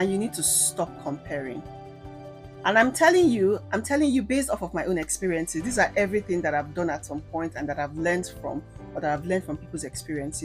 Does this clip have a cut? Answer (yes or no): no